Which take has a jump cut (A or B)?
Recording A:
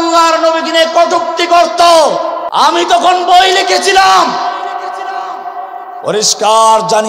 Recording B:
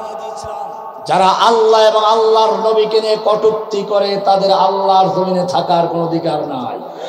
A